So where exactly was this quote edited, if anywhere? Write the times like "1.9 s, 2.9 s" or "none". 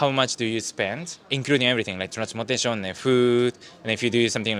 none